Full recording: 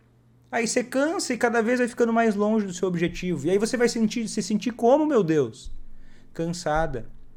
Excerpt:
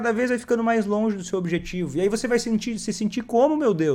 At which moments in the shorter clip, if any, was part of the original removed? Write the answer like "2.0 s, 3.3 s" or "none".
none